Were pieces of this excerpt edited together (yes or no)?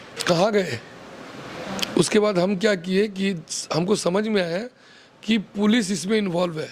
no